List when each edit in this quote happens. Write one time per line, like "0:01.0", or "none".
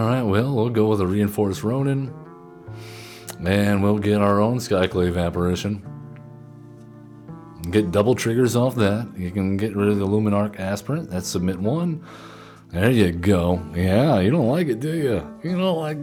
none